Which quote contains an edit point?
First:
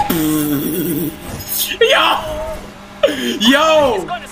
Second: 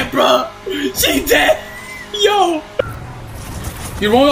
second; 1 cut; at 2.7 s

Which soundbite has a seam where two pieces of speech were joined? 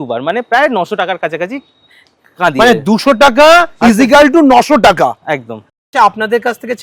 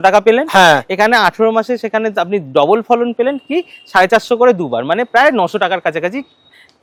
first; 1 cut; at 5.7 s

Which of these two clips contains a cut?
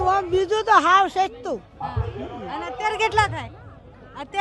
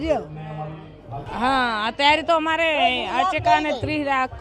second; 1 cut; at 1.2 s

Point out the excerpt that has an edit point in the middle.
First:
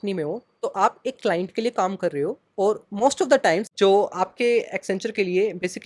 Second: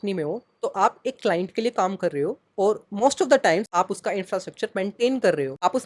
first; 1 cut; at 3.7 s

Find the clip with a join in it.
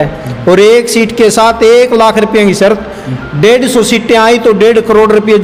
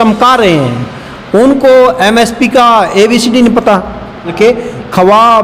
second; 1 cut; at 4.3 s

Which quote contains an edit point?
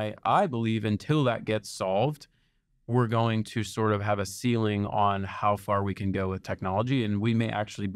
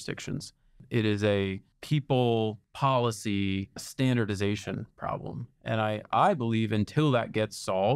second; 4 cuts; at 0.9 s, 1.7 s, 2.6 s, 3.9 s

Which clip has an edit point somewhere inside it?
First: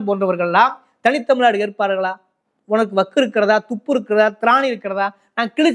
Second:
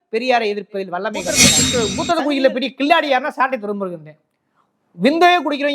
second; 1 cut; at 1.6 s

